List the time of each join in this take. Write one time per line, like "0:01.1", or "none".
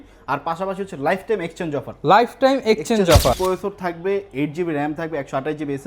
0:03.4